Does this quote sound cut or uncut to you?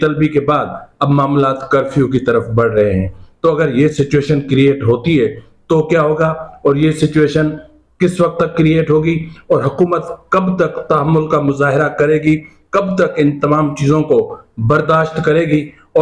uncut